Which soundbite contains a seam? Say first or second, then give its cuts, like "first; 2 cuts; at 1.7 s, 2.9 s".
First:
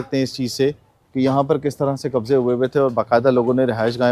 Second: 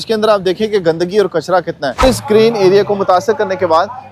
second; 1 cut; at 2.0 s